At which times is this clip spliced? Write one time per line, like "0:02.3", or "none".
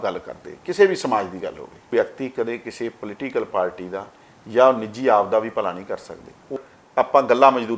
0:01.9
0:06.6